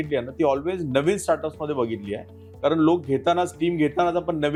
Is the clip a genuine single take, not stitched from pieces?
yes; 0 cuts

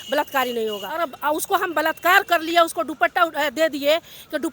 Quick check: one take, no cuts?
no; 1 cut; at 1.0 s

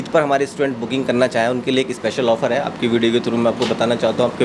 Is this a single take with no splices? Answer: yes; 0 cuts

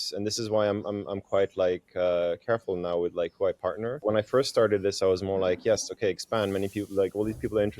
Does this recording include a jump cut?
yes; 1 cut; at 4.0 s

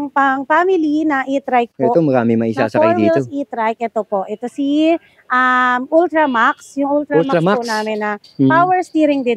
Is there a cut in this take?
no; 0 cuts

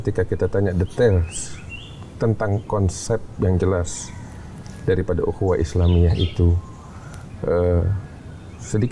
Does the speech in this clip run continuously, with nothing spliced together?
yes; 0 cuts

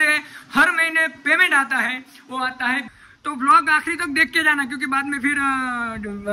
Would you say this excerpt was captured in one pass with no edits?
no; 1 cut; at 2.8 s

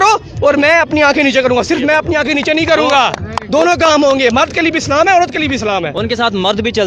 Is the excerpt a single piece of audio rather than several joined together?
yes; 0 cuts

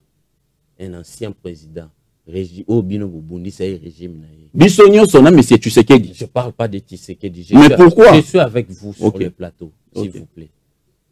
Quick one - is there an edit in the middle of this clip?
no; 0 cuts

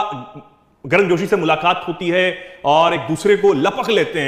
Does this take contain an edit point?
no; 0 cuts

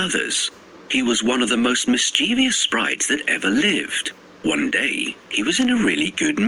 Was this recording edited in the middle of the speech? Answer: no; 0 cuts

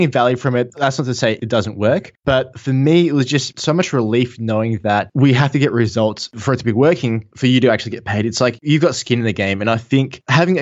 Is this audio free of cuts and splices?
yes; 0 cuts

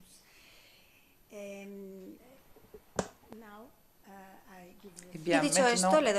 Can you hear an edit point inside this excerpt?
yes; 1 cut; at 4.5 s

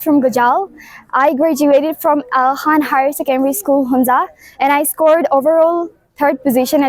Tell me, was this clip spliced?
no; 0 cuts

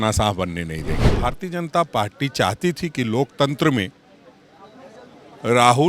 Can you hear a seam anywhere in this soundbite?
yes; 1 cut; at 1.0 s

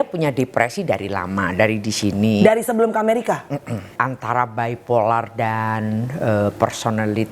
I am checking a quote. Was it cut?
yes; 1 cut; at 3.9 s

